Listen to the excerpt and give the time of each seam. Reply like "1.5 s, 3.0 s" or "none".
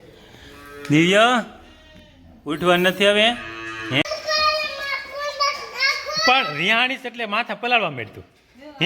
4.0 s